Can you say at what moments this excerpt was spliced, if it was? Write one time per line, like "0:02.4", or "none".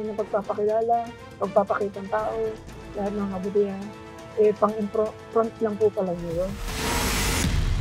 0:06.7